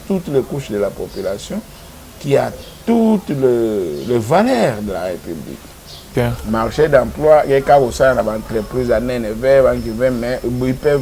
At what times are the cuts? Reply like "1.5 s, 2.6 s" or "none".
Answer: 6.1 s